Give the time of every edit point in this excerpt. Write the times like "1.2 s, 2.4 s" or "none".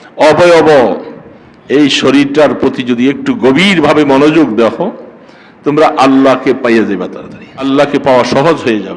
7.6 s